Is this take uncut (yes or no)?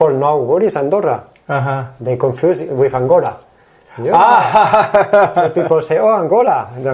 yes